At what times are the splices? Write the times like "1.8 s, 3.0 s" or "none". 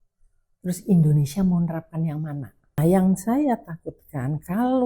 2.8 s